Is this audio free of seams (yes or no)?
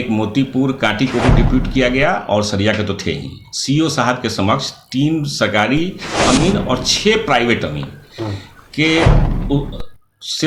yes